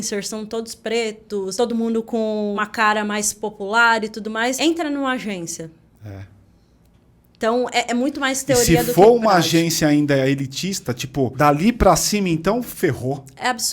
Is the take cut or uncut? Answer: cut